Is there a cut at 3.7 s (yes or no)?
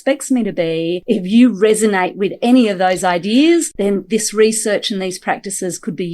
yes